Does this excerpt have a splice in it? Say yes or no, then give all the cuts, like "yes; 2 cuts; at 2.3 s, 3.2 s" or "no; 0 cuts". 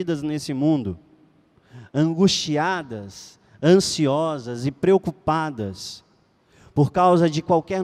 no; 0 cuts